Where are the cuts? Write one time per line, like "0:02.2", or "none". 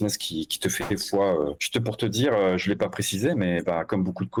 none